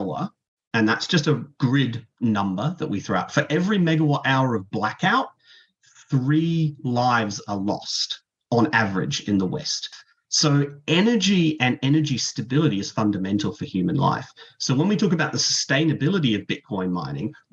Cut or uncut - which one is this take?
cut